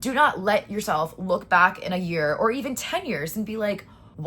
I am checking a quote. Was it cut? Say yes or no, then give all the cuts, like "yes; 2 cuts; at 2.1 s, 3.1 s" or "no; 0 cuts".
no; 0 cuts